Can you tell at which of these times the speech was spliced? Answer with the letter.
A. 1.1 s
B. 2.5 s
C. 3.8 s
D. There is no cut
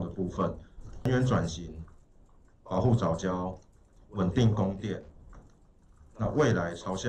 A